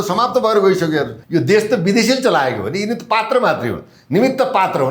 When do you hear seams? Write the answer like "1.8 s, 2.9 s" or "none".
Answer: 1.2 s